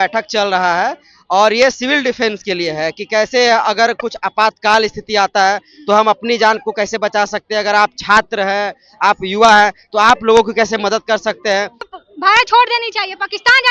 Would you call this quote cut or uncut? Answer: cut